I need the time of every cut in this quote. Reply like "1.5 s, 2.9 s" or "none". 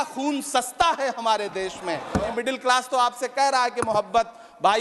2.3 s